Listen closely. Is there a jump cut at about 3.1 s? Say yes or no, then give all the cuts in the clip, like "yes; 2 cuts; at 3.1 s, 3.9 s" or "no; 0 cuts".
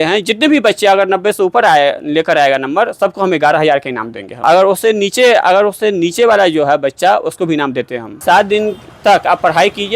no; 2 cuts; at 4.4 s, 8.0 s